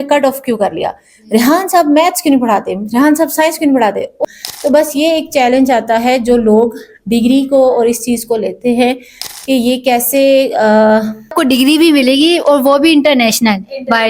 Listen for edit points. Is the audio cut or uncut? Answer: cut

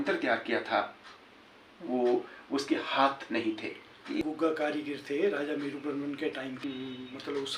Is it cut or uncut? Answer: cut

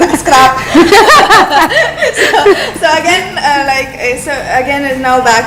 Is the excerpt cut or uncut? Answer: uncut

